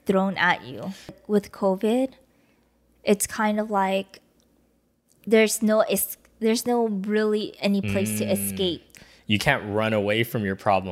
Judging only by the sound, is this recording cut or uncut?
cut